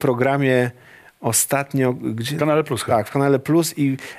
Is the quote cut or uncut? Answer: uncut